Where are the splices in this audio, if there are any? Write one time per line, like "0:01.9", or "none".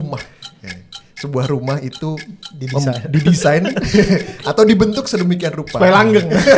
none